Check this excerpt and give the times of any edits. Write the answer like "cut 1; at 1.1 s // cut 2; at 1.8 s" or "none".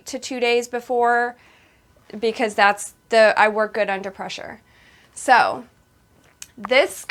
none